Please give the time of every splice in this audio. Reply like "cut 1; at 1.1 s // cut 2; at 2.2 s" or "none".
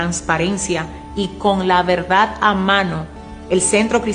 cut 1; at 3.1 s